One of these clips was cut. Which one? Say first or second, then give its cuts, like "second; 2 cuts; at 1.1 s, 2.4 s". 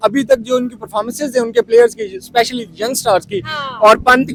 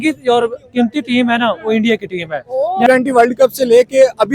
second; 1 cut; at 2.9 s